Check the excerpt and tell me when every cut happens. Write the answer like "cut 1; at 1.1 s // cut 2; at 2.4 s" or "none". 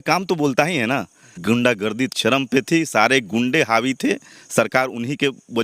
cut 1; at 1.4 s